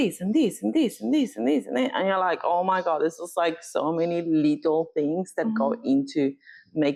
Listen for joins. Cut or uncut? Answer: uncut